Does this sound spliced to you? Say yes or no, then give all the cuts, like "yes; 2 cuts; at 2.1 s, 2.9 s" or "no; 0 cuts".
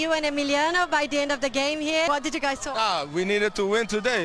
yes; 1 cut; at 2.2 s